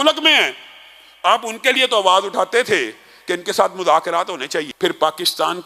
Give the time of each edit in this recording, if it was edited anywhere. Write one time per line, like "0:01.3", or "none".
0:04.7

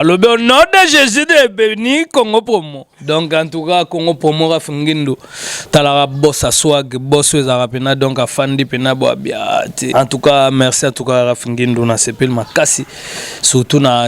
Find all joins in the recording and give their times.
0:09.8

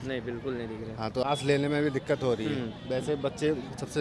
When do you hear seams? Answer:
0:01.2

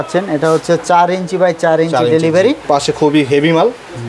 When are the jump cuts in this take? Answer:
0:02.6

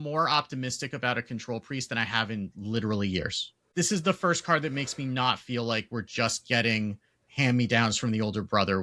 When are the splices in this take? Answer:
0:03.6

